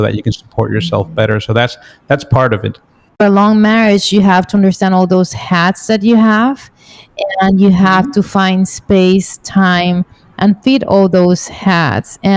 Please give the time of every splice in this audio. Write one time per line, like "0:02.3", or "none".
0:03.2